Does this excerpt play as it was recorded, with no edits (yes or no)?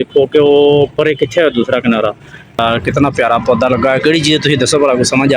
no